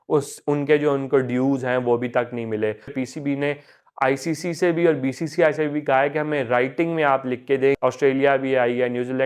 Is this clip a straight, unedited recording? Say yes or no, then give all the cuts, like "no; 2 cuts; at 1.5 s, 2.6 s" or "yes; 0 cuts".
no; 2 cuts; at 3.0 s, 7.8 s